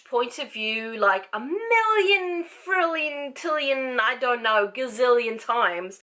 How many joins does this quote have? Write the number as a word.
zero